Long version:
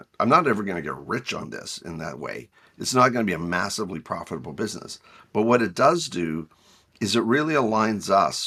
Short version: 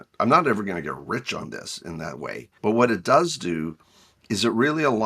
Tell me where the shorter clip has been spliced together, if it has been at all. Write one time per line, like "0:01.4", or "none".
0:02.5